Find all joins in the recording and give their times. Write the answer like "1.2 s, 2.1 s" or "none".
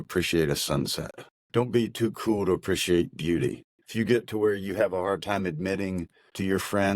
1.4 s